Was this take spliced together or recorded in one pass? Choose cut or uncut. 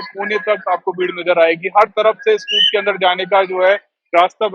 uncut